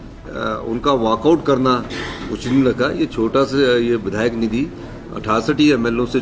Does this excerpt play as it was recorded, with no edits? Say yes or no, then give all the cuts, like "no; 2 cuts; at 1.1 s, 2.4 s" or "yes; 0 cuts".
yes; 0 cuts